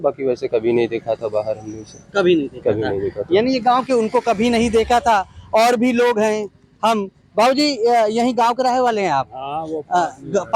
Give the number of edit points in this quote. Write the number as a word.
zero